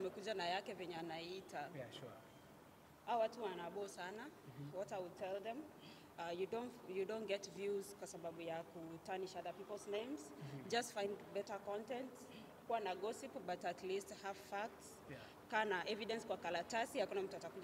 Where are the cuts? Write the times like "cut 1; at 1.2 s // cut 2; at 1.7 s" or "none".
none